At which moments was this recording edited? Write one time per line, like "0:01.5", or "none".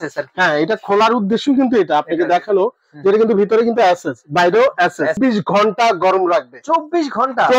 0:05.2